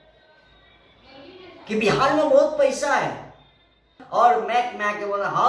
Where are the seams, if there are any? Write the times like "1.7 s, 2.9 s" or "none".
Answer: 4.0 s